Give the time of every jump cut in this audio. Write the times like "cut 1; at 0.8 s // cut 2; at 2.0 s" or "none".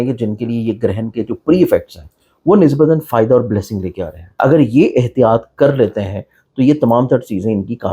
cut 1; at 4.2 s